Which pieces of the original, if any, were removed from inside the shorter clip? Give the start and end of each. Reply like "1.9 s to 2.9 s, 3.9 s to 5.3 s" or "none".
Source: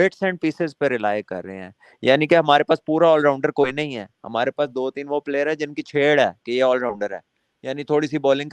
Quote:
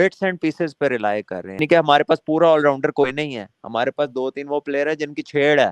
1.6 s to 2.2 s